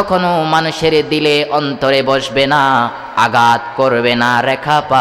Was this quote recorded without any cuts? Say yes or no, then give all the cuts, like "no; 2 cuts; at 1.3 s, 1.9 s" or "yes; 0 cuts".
yes; 0 cuts